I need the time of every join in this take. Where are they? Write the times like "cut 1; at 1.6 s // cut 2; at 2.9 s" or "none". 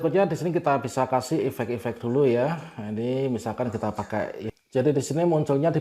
cut 1; at 4.5 s